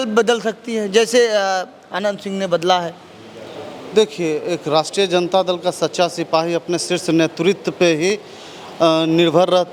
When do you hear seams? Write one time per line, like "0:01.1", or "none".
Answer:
none